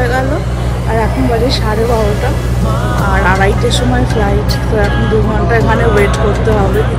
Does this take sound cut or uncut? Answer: uncut